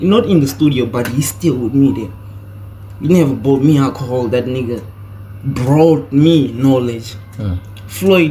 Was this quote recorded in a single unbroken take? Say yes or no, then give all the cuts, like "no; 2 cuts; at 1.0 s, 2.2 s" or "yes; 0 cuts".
yes; 0 cuts